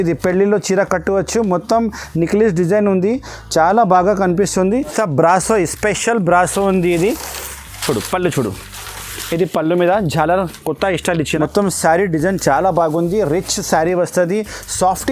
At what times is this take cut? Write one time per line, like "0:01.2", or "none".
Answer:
0:05.0
0:11.3